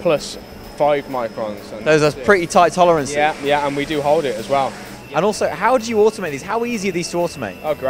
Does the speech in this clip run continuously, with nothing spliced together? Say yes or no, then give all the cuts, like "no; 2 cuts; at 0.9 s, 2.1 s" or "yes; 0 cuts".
no; 1 cut; at 5.0 s